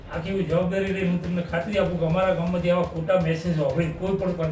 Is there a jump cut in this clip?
no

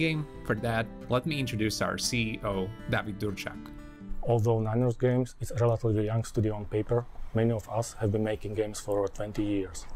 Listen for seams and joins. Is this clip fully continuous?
yes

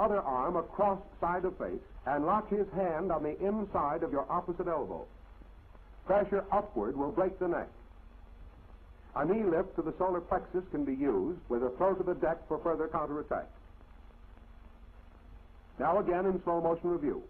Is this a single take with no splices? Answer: yes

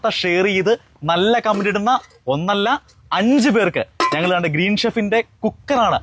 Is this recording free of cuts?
yes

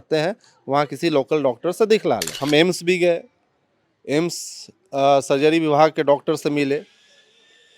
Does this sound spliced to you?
yes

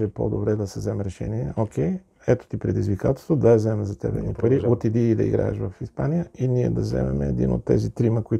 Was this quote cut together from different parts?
no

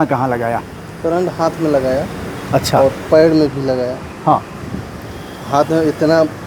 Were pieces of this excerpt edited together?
no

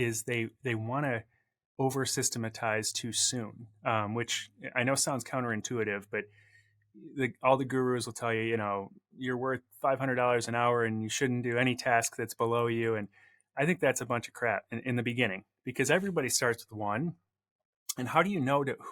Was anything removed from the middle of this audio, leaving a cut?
no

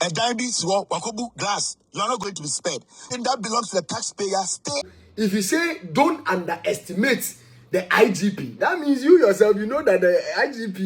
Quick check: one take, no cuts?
no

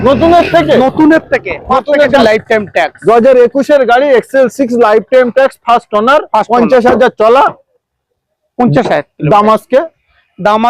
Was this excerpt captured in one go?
no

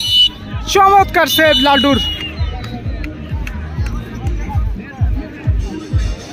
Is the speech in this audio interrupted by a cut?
yes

